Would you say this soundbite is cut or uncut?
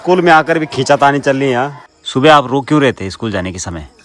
cut